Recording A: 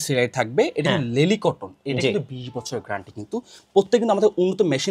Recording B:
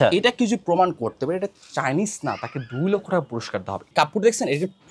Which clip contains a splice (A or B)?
B